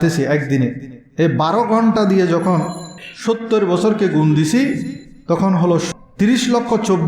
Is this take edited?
yes; 1 cut; at 5.9 s

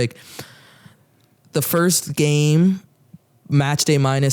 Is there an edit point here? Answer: no; 0 cuts

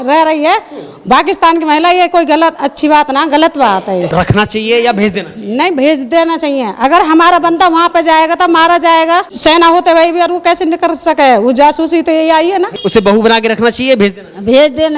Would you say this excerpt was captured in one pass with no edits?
no; 3 cuts; at 4.1 s, 9.3 s, 12.8 s

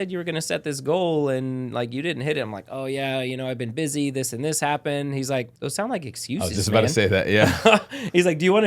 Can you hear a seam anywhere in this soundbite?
yes; 1 cut; at 5.6 s

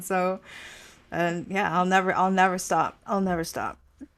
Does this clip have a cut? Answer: no; 0 cuts

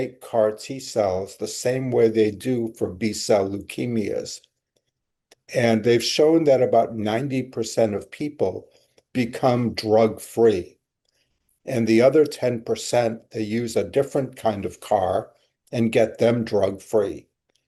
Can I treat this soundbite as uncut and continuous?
yes; 0 cuts

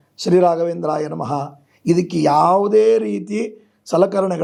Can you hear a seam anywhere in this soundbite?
no; 0 cuts

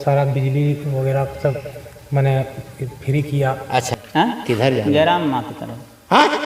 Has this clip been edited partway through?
yes; 1 cut; at 3.9 s

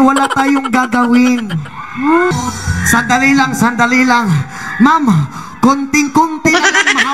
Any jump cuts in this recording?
yes; 1 cut; at 2.4 s

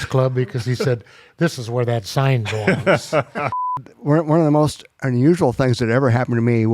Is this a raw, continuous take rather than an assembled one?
no; 1 cut; at 3.7 s

